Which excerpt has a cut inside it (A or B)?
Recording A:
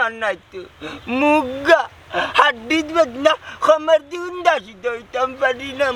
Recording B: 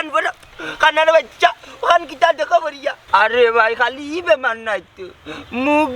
B